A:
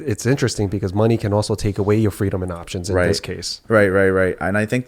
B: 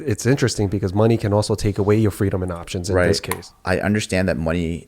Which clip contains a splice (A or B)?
B